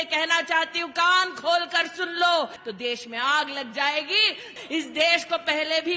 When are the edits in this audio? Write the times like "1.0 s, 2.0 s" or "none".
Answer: 2.6 s, 4.6 s